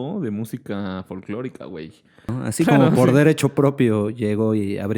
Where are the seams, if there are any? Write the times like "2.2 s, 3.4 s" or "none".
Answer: 2.4 s